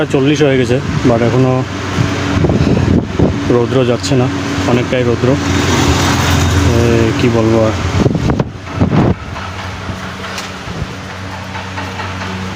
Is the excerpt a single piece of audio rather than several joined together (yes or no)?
yes